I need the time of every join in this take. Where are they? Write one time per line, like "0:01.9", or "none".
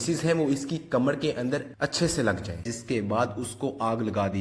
0:02.7